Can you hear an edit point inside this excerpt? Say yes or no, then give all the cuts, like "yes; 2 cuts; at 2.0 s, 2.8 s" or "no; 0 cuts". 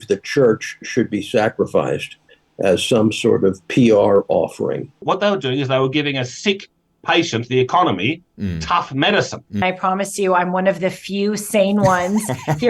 yes; 2 cuts; at 5.0 s, 9.6 s